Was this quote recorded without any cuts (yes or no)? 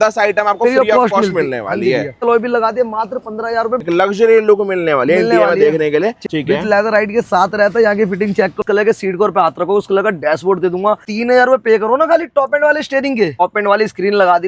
no